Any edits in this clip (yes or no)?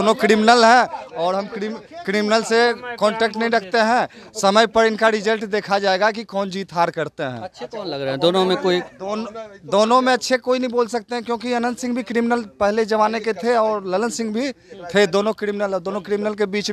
no